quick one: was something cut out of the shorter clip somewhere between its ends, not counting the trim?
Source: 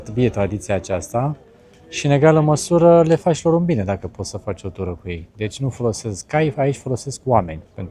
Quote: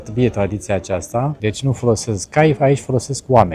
yes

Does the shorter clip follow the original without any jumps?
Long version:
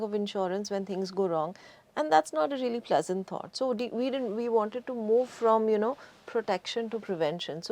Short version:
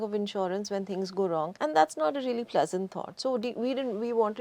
no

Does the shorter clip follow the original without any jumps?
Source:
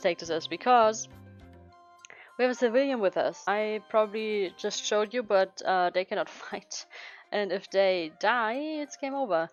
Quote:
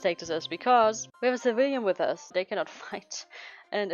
no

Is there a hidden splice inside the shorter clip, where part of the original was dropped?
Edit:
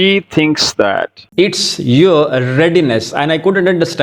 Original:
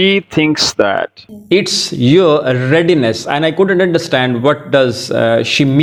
yes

